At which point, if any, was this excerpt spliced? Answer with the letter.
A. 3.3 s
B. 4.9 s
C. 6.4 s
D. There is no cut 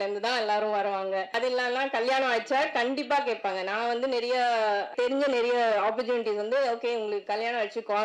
B